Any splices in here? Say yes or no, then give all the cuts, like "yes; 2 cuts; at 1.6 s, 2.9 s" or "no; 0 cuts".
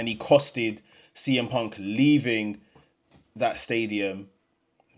no; 0 cuts